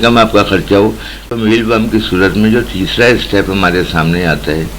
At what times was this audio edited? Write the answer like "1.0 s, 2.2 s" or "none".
1.4 s